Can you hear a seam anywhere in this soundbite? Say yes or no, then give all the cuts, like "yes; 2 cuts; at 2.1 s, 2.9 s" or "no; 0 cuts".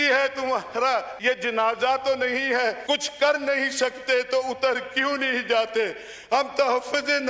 yes; 2 cuts; at 1.1 s, 2.8 s